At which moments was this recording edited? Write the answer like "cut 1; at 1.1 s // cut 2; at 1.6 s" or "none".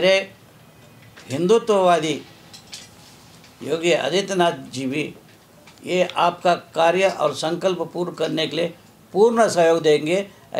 none